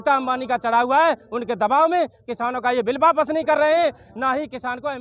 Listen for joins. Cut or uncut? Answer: uncut